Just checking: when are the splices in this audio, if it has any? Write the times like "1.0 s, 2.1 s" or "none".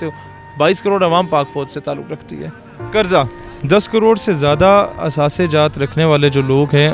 2.7 s